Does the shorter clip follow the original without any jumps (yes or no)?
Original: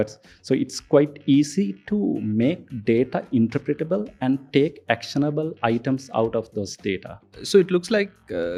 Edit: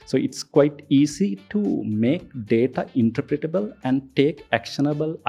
yes